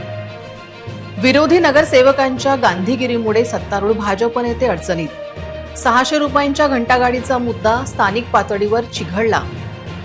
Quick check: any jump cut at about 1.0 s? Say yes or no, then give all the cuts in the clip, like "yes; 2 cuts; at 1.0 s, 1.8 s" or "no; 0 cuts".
yes; 1 cut; at 1.0 s